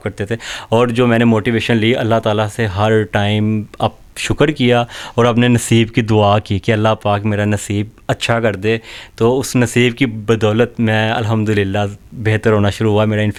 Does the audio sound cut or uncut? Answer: uncut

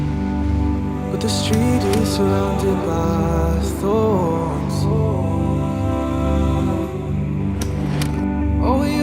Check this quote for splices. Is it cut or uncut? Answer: uncut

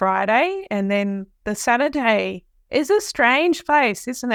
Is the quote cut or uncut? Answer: uncut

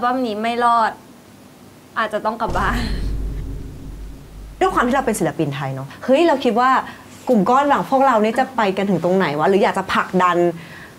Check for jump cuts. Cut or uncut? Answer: cut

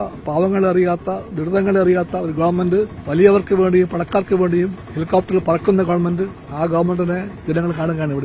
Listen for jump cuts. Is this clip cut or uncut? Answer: cut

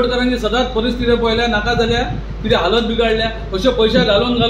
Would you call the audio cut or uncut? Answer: uncut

